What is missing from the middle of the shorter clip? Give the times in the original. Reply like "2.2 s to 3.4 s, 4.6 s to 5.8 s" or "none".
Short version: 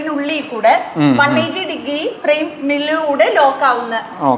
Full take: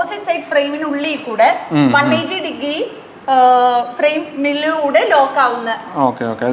2.9 s to 3.9 s